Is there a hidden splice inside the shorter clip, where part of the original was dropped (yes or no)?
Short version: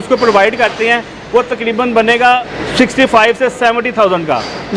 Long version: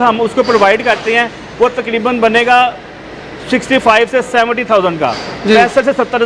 yes